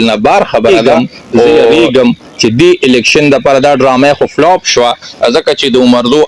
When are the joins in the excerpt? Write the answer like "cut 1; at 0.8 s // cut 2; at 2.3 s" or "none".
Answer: cut 1; at 1.8 s

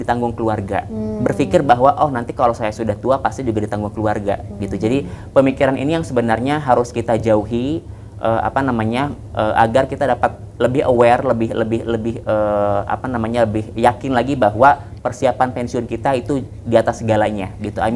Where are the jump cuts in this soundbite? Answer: none

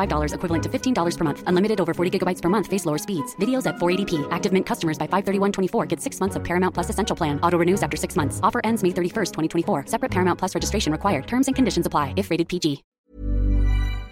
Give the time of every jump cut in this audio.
cut 1; at 12.9 s

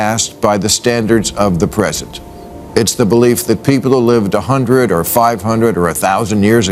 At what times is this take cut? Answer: none

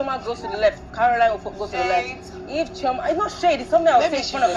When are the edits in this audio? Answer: cut 1; at 3.6 s

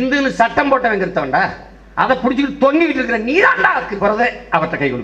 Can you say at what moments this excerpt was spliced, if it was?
cut 1; at 4.0 s

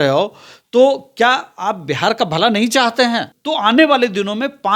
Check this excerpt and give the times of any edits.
cut 1; at 3.3 s

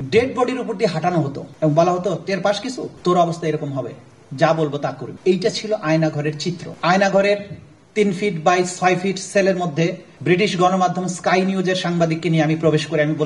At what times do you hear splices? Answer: cut 1; at 1.4 s // cut 2; at 2.9 s // cut 3; at 5.1 s // cut 4; at 6.7 s // cut 5; at 10.1 s

